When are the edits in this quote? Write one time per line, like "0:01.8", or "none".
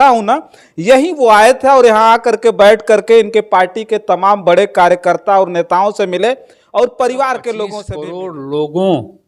0:07.8